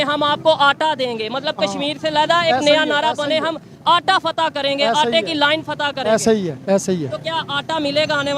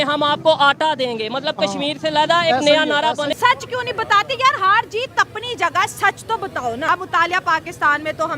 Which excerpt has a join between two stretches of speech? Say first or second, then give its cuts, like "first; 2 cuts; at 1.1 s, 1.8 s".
second; 2 cuts; at 3.3 s, 6.9 s